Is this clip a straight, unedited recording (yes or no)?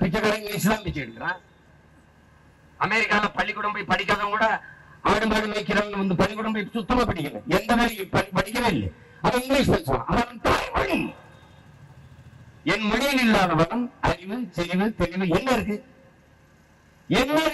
yes